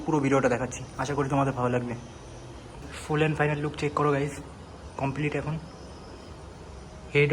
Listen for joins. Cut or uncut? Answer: cut